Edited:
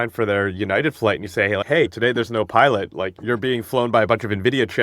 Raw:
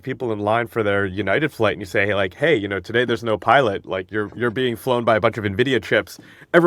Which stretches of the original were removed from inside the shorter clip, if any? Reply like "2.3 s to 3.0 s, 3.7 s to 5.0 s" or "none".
2.3 s to 2.7 s, 4.1 s to 4.3 s